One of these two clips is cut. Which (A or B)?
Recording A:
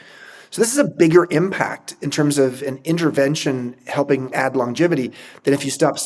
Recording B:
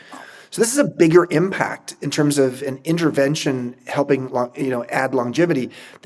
A